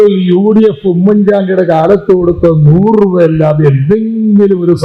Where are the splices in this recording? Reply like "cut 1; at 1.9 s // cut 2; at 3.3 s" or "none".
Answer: none